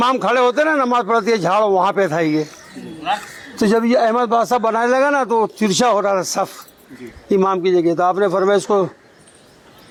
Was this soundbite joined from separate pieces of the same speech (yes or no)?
no